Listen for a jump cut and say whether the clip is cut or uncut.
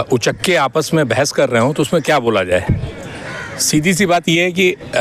uncut